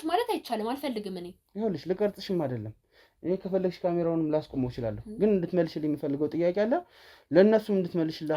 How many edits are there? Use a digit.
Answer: 0